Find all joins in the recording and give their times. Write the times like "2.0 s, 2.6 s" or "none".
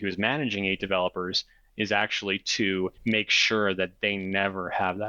3.0 s